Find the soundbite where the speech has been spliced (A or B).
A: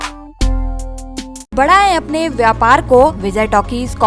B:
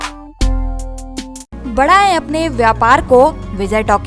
A